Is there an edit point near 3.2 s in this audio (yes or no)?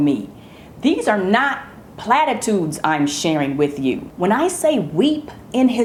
no